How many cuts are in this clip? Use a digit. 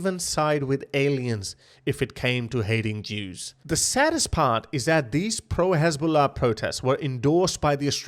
1